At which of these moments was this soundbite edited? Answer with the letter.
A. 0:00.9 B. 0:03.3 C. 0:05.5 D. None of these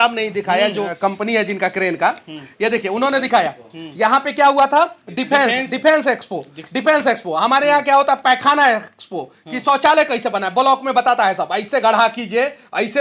A